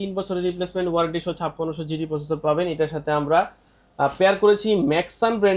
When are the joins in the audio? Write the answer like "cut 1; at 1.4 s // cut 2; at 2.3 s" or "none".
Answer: none